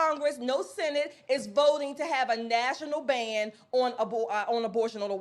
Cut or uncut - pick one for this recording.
uncut